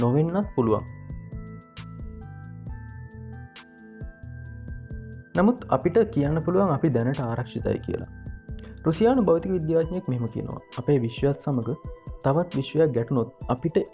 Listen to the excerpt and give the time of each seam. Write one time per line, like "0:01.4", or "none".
0:01.4
0:05.3